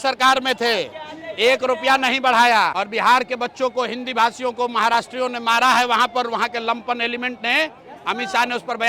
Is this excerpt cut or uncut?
cut